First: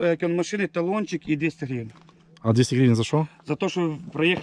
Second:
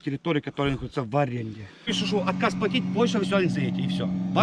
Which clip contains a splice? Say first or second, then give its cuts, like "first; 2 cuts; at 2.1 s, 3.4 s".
second; 1 cut; at 1.9 s